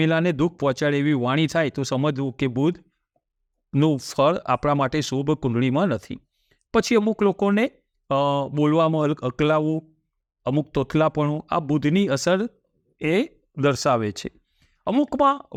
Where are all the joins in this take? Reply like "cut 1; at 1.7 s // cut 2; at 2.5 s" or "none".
none